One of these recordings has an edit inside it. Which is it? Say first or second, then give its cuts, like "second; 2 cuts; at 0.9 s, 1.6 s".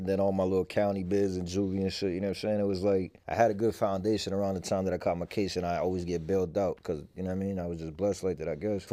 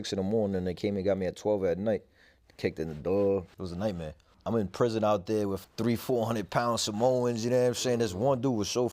second; 3 cuts; at 3.5 s, 4.3 s, 5.6 s